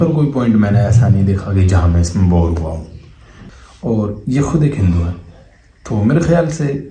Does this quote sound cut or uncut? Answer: cut